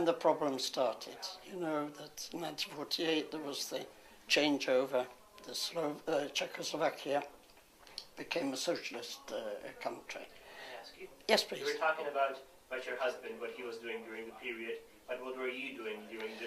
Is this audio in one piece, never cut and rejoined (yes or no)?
yes